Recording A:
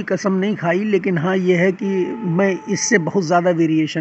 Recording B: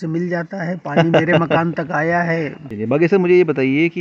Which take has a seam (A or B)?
B